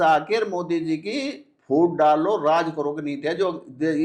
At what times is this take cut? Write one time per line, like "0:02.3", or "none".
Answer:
none